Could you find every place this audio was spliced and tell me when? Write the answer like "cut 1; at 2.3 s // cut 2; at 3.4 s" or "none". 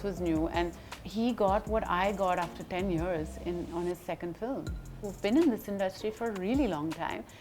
cut 1; at 4.9 s